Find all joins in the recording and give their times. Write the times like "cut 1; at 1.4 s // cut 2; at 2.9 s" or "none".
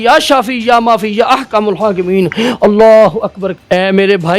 cut 1; at 3.5 s